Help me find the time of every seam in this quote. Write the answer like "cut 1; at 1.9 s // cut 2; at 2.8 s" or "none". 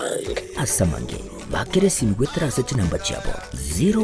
none